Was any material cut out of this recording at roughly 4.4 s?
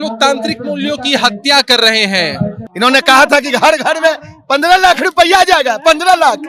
no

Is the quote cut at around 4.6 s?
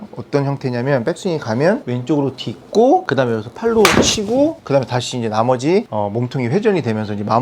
yes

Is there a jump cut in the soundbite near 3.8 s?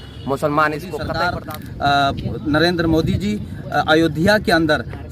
no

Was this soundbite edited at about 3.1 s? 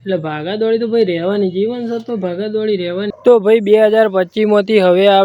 yes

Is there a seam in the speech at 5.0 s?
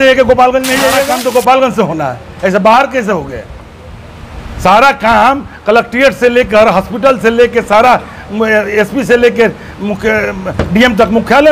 no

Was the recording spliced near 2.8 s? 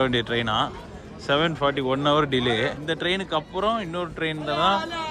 yes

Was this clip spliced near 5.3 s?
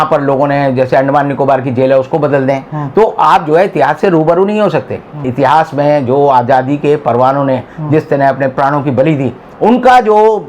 yes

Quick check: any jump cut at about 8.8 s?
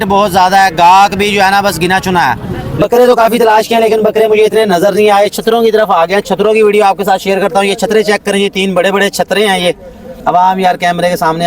no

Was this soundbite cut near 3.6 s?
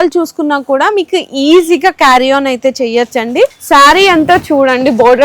yes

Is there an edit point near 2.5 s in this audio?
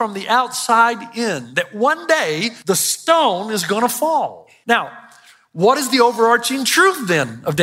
yes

